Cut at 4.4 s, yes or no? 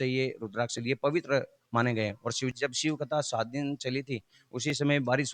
no